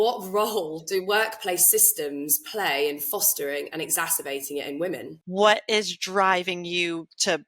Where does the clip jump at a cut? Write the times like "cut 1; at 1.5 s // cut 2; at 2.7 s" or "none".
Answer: cut 1; at 5.2 s